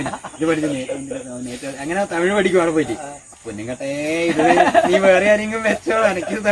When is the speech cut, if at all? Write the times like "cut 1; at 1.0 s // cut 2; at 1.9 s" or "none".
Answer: cut 1; at 3.2 s